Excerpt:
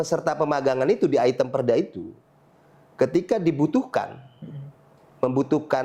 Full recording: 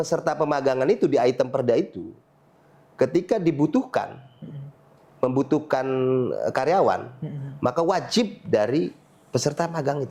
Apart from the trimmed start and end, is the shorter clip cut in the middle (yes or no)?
no